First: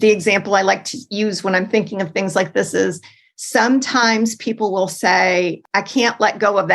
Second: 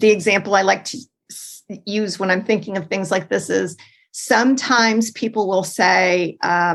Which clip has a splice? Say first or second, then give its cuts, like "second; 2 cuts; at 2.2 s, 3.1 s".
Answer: first; 2 cuts; at 1.0 s, 5.6 s